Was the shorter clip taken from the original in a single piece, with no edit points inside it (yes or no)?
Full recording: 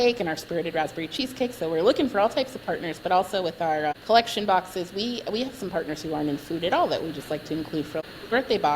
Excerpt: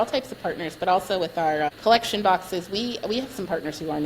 yes